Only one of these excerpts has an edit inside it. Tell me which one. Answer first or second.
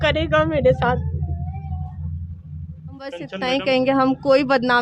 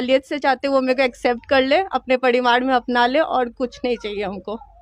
first